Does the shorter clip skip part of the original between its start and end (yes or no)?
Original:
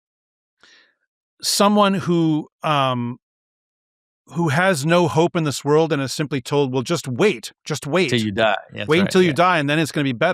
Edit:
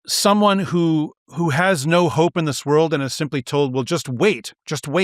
yes